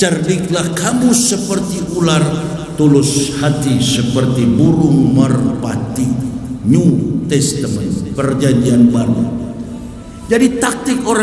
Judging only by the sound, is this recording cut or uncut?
uncut